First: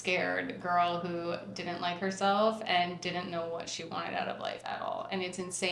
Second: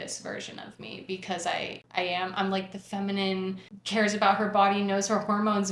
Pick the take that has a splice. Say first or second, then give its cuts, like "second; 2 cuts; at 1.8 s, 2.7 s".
second; 2 cuts; at 1.8 s, 3.7 s